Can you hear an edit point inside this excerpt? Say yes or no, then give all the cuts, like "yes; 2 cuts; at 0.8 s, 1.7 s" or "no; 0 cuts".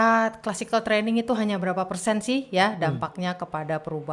no; 0 cuts